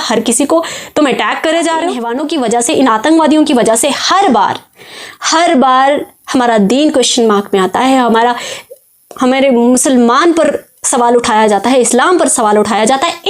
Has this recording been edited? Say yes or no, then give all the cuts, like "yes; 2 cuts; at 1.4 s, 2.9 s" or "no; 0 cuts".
yes; 1 cut; at 2.1 s